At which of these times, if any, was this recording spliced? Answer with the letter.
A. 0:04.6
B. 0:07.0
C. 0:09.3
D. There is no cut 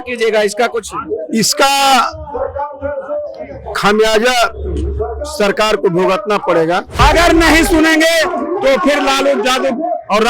B